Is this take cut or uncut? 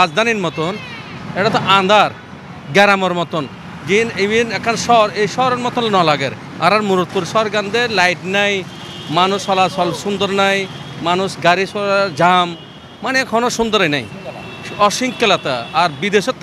uncut